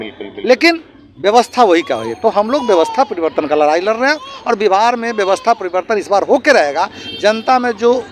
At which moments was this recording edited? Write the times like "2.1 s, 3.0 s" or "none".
none